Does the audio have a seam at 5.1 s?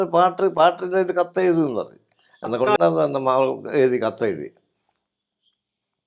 no; 1 cut; at 2.8 s

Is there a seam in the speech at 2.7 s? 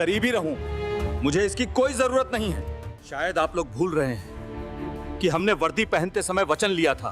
yes; 1 cut; at 2.7 s

